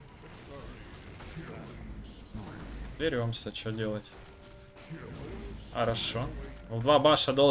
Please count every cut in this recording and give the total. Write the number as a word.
zero